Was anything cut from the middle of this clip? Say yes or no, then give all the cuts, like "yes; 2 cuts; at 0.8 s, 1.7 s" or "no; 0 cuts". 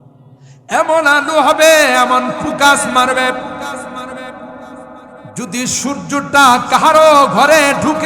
no; 0 cuts